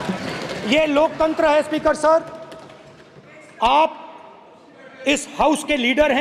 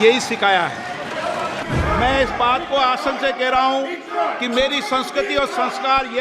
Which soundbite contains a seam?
second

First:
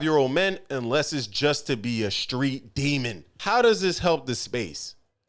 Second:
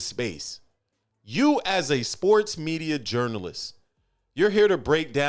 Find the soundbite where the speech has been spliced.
first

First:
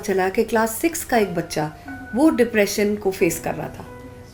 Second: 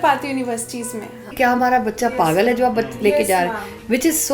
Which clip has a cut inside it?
second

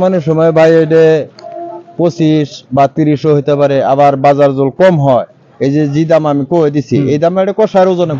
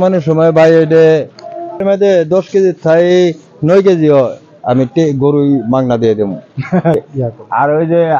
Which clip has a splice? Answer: second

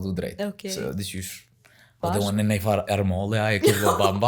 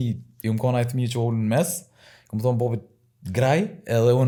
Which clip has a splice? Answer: first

